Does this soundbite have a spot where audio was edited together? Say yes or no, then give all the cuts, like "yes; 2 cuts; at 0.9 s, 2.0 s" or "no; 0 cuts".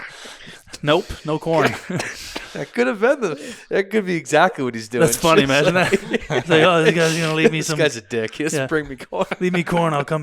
yes; 1 cut; at 9.3 s